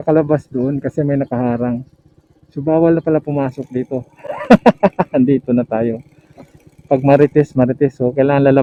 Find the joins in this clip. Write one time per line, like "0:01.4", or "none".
none